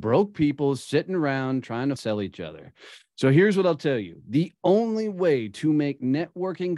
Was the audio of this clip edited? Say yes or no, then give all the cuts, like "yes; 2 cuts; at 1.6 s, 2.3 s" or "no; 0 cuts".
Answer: yes; 1 cut; at 2.0 s